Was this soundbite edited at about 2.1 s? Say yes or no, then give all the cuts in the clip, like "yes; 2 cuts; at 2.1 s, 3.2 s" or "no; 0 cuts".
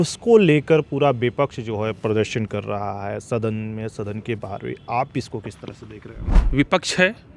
no; 1 cut; at 6.4 s